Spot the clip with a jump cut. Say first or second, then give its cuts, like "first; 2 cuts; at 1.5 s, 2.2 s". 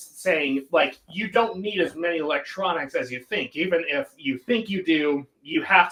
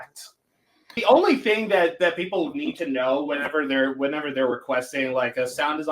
second; 1 cut; at 1.0 s